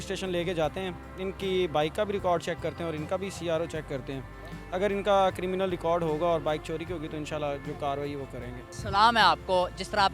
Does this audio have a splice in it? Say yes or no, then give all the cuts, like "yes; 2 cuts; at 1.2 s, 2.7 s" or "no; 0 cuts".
no; 0 cuts